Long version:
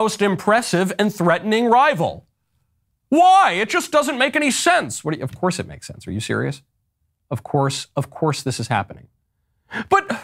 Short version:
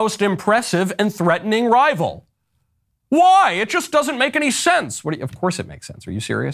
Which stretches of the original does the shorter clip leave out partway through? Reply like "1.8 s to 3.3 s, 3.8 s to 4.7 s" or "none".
none